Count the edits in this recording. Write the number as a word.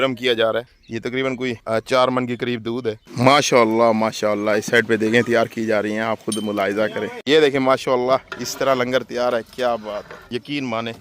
four